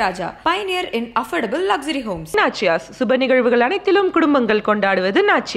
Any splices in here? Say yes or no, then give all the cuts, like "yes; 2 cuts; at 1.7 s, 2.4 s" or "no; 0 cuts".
no; 0 cuts